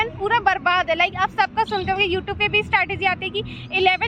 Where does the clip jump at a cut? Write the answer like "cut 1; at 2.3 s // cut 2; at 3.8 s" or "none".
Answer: none